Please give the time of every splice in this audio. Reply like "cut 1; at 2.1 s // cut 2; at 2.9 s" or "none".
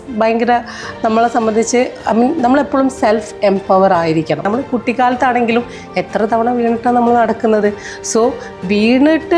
cut 1; at 4.5 s